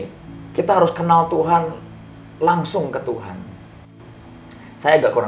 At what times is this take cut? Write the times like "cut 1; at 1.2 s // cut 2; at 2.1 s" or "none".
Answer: none